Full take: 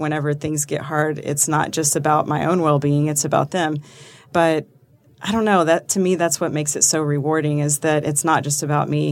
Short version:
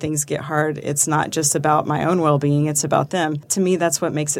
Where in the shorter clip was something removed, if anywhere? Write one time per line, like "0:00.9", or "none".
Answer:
0:03.5